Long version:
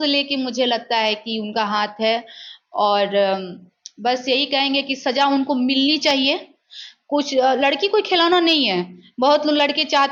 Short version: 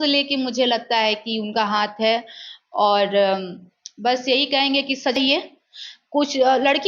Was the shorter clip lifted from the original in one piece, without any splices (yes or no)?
no